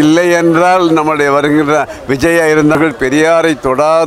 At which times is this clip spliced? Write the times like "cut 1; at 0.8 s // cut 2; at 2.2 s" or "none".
cut 1; at 2.7 s